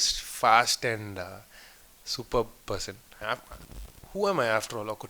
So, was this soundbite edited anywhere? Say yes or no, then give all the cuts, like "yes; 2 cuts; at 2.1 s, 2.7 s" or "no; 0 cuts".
yes; 1 cut; at 3.2 s